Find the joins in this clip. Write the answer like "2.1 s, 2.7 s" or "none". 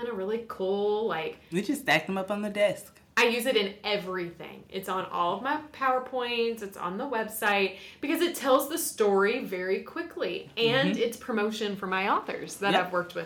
none